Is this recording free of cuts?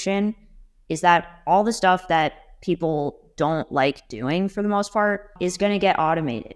no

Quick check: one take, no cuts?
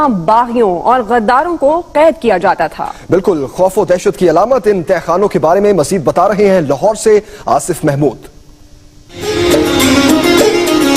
no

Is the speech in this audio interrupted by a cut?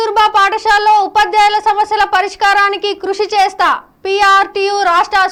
no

